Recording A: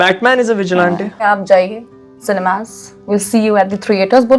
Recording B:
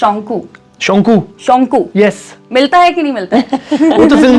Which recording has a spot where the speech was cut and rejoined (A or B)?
A